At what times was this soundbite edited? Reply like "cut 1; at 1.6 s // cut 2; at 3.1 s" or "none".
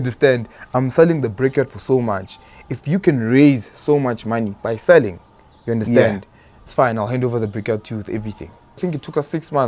cut 1; at 8.8 s